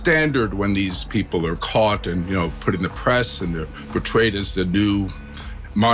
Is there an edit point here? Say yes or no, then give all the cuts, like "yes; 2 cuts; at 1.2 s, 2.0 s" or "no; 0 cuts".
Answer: no; 0 cuts